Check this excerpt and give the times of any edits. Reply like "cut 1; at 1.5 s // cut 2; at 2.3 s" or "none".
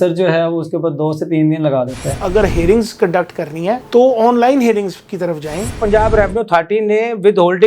cut 1; at 2.2 s // cut 2; at 5.8 s